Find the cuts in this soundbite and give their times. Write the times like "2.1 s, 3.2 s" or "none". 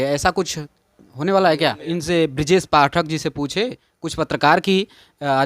1.9 s

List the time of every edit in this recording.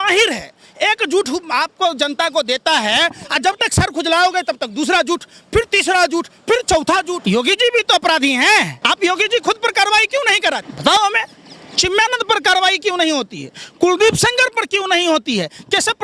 7.1 s, 8.7 s, 10.7 s

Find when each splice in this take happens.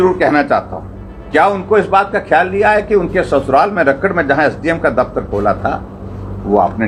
none

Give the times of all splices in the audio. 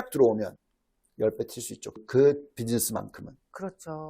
2.0 s

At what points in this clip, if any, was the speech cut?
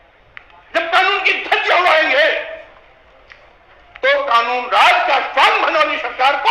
none

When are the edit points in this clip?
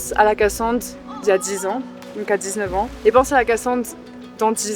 2.9 s

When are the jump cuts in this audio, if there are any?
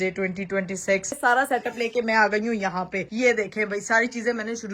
1.2 s

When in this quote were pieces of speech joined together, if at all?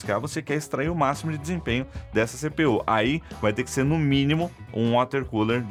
none

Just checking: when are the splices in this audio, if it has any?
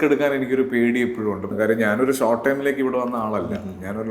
1.5 s

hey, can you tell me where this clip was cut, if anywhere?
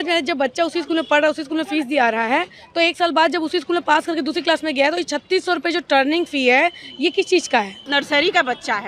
7.9 s

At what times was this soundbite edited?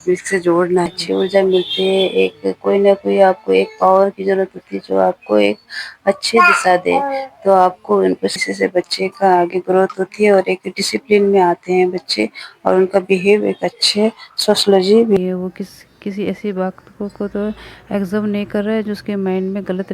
0.9 s, 8.5 s, 15.2 s

